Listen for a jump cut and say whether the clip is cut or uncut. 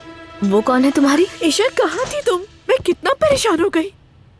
uncut